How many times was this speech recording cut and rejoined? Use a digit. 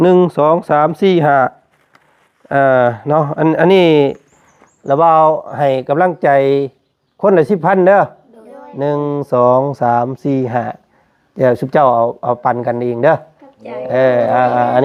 0